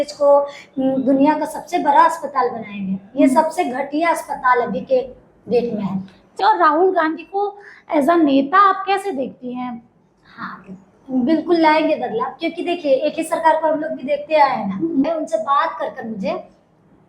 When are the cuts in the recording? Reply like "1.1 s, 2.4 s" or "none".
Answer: 6.2 s, 15.1 s